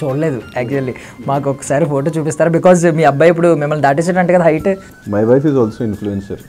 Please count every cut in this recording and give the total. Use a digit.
1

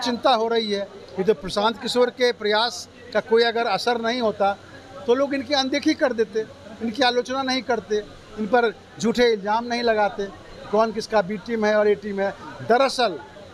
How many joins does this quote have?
0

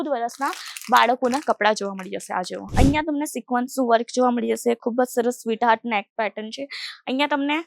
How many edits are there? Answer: 1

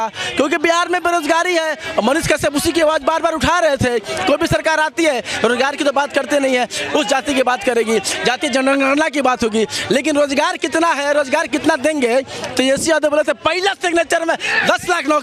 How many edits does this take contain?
0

